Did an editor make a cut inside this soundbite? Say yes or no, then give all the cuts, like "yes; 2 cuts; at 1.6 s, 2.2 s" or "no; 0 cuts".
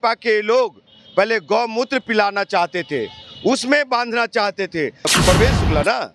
yes; 1 cut; at 5.1 s